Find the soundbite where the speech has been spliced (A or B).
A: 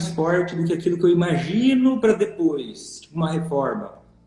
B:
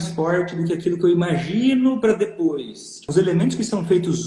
B